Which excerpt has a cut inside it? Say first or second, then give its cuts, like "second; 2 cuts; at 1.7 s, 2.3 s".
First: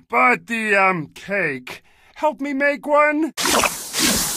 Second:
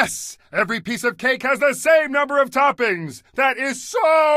first; 1 cut; at 3.4 s